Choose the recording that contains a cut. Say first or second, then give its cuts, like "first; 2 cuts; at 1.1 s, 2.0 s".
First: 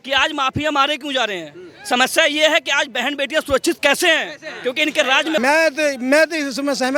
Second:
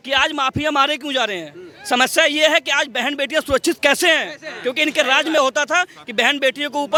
first; 1 cut; at 5.4 s